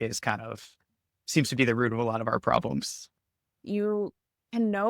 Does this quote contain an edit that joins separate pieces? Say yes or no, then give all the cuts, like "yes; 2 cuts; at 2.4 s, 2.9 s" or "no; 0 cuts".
yes; 1 cut; at 3.6 s